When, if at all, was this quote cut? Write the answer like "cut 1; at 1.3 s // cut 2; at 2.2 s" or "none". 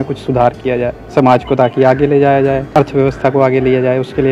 cut 1; at 1.0 s // cut 2; at 2.7 s